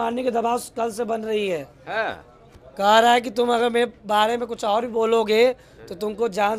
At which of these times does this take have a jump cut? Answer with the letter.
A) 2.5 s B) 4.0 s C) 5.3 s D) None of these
D